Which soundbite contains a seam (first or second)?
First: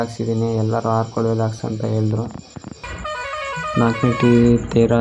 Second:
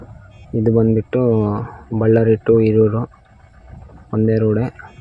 first